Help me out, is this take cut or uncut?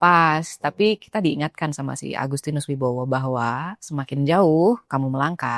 uncut